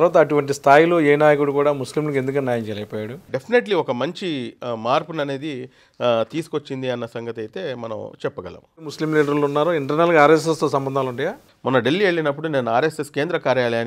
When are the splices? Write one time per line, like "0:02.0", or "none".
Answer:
0:03.3
0:08.9
0:11.5